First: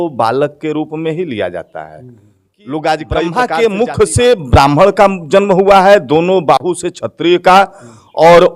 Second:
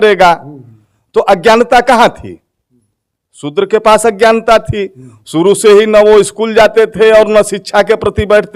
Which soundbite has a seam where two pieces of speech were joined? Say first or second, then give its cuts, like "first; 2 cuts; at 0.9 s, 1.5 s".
first; 1 cut; at 3.3 s